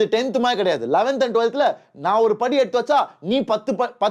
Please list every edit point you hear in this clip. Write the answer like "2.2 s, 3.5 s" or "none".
none